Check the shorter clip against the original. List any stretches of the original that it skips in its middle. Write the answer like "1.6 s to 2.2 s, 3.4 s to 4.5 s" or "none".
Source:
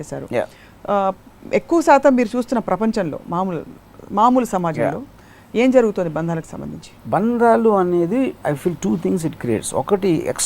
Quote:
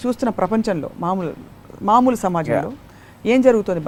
none